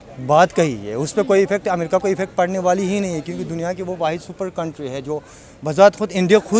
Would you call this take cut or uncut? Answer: uncut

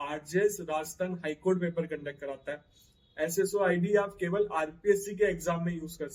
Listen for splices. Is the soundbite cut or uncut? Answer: uncut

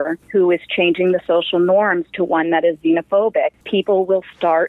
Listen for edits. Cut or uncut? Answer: cut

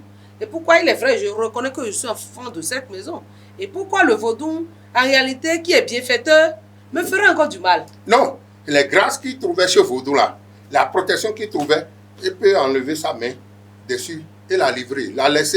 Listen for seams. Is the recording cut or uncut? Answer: uncut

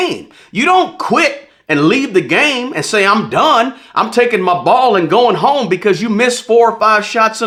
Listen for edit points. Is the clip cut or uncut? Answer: uncut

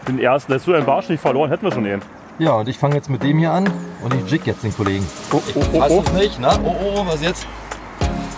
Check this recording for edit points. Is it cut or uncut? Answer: cut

